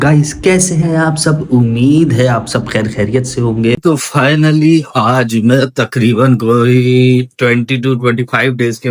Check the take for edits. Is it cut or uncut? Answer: cut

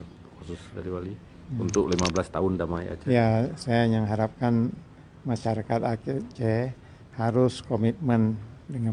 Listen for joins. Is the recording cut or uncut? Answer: uncut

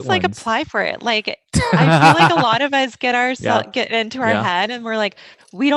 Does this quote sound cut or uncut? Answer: uncut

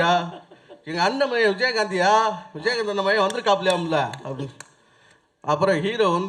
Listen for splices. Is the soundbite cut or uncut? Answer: uncut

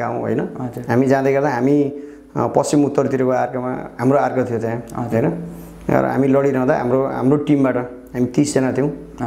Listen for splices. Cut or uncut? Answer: uncut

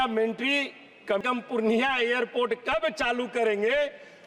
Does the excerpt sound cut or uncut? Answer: cut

